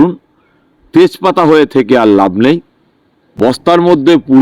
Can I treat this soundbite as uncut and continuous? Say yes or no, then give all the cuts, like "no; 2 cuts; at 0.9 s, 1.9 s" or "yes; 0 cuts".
no; 1 cut; at 3.5 s